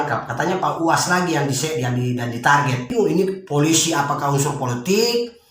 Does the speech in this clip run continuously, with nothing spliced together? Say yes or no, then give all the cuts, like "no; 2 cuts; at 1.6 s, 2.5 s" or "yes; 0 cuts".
no; 1 cut; at 2.9 s